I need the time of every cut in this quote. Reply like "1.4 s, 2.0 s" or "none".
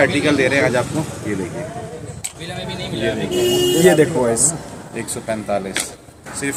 none